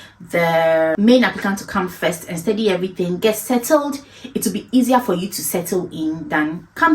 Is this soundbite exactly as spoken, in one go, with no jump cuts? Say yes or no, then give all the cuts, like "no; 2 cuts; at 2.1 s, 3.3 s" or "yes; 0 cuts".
no; 1 cut; at 0.9 s